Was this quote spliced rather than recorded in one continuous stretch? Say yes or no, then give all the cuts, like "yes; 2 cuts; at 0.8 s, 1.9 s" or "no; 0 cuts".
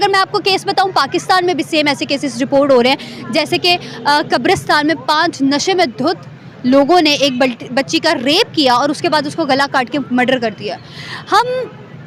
no; 0 cuts